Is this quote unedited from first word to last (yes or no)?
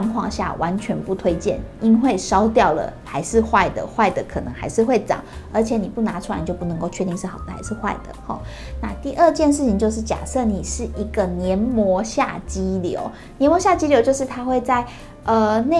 yes